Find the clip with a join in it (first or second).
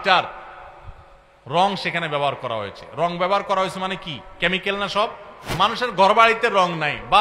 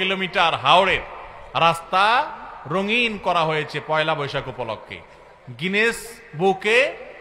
first